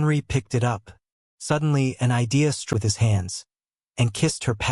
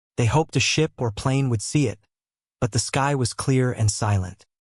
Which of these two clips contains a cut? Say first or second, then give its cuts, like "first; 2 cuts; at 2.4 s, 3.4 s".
first; 1 cut; at 2.7 s